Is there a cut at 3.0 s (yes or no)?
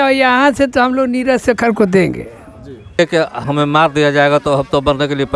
yes